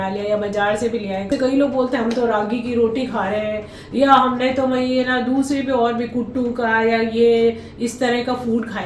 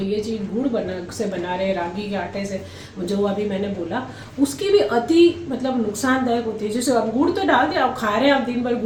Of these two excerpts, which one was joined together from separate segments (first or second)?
first